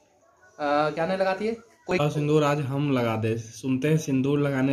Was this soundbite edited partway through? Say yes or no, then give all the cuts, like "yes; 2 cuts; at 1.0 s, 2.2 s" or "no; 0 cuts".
yes; 1 cut; at 1.7 s